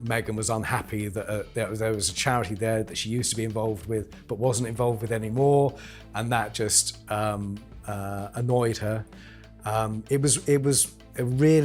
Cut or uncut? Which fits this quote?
uncut